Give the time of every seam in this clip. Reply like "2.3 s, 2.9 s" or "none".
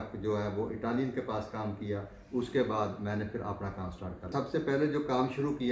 4.3 s